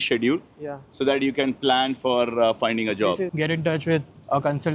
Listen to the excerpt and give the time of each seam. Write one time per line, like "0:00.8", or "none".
0:03.3